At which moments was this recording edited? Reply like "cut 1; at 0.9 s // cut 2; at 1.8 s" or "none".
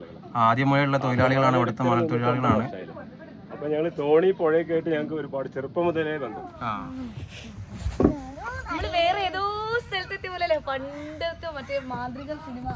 cut 1; at 6.5 s